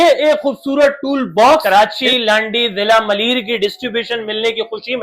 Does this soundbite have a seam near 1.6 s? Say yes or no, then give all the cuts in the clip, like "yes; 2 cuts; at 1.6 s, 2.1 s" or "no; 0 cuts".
yes; 1 cut; at 1.6 s